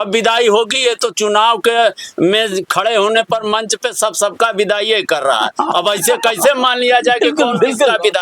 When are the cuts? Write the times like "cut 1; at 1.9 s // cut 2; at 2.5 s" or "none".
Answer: none

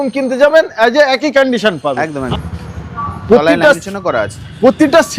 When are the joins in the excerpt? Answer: cut 1; at 2.2 s

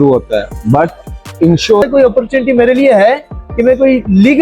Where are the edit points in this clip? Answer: cut 1; at 1.8 s

